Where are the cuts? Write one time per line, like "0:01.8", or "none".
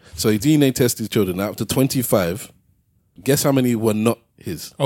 0:03.0